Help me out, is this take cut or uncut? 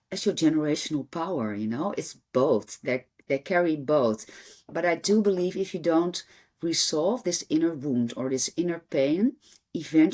uncut